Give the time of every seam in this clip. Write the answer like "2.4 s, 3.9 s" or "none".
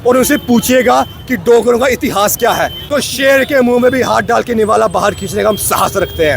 2.4 s